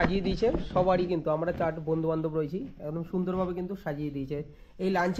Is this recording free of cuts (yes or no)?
yes